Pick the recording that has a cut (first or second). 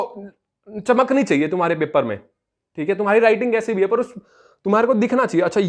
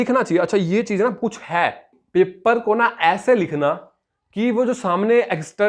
second